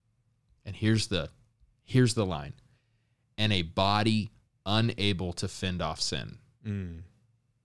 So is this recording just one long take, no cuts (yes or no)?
yes